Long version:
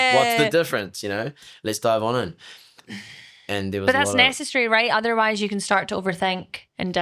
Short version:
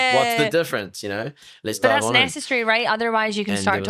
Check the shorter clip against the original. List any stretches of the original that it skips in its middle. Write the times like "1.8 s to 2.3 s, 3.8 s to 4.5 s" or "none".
2.3 s to 4.4 s